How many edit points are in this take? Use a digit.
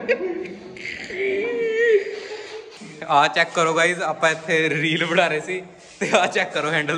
1